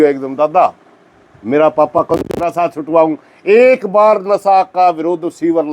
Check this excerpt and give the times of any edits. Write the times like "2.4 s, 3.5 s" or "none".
2.4 s